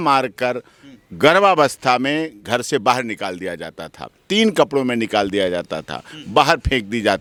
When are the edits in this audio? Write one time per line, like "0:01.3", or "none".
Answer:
none